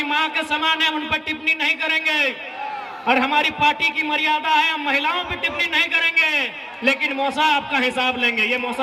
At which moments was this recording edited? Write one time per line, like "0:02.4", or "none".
none